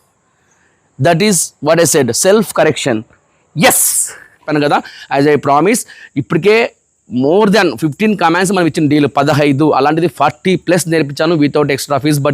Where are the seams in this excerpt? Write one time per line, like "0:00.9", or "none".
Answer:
0:04.4